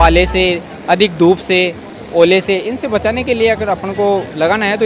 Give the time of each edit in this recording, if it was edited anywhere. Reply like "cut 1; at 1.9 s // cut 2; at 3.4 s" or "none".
none